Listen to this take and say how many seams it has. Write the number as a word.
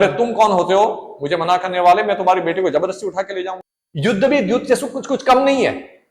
one